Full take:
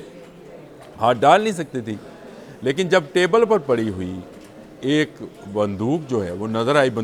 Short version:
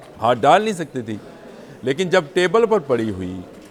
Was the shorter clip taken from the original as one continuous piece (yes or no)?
yes